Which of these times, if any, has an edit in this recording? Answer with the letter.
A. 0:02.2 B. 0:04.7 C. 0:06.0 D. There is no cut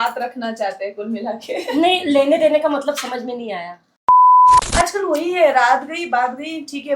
B